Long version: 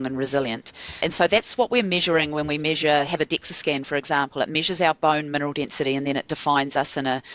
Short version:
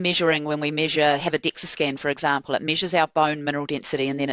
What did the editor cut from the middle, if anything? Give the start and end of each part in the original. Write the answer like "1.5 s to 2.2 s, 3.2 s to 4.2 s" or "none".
none